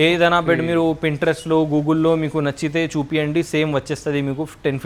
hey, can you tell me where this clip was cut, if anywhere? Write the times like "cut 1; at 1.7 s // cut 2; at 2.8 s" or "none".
none

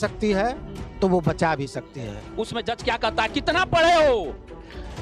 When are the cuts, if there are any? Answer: cut 1; at 2.2 s

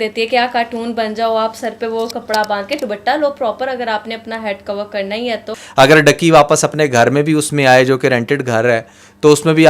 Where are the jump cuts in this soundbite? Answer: cut 1; at 5.5 s

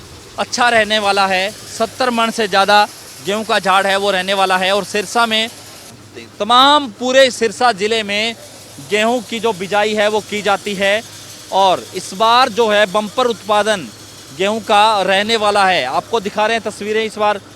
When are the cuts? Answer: cut 1; at 6.0 s

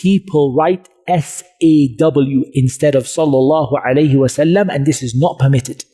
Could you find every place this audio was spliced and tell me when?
none

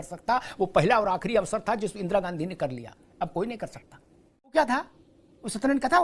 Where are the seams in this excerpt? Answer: cut 1; at 4.5 s

